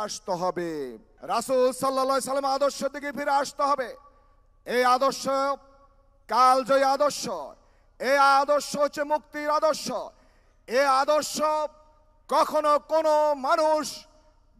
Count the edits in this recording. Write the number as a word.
one